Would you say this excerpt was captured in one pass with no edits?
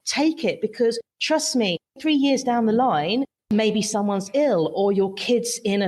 no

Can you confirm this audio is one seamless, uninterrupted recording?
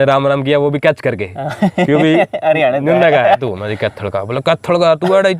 no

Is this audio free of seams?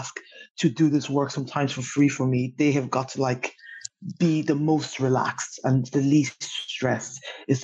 yes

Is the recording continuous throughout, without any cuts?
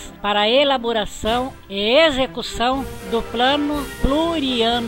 yes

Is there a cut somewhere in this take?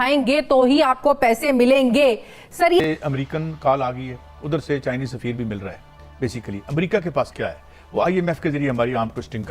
yes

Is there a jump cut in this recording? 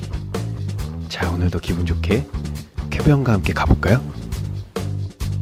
no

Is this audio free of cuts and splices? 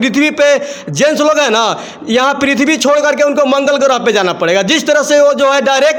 yes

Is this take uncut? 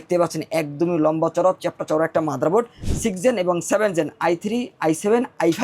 no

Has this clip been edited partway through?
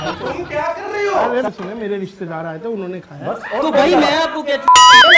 yes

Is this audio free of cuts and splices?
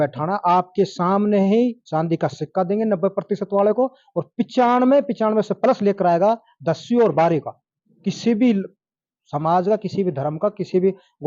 yes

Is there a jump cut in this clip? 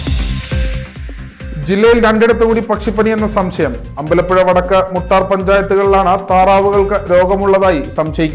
yes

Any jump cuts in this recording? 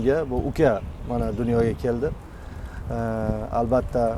no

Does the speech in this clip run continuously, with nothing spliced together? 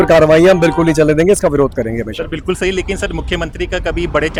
yes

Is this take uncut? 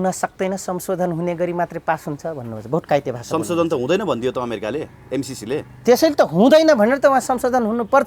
yes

